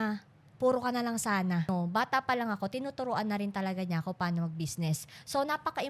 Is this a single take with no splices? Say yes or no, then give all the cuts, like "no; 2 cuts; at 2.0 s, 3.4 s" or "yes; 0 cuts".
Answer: no; 1 cut; at 1.7 s